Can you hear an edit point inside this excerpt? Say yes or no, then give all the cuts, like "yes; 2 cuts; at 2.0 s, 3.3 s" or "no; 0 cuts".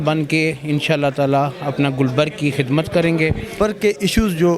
yes; 1 cut; at 3.5 s